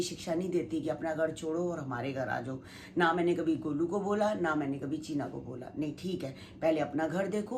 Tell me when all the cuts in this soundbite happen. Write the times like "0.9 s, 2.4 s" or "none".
none